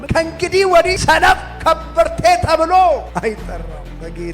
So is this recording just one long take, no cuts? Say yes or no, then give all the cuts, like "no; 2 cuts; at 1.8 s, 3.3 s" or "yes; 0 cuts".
no; 1 cut; at 1.0 s